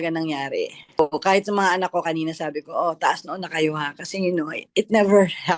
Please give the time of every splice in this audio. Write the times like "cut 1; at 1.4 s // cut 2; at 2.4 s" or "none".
cut 1; at 1.0 s